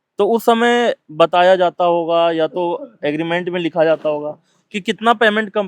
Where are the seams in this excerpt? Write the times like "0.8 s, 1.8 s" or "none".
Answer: none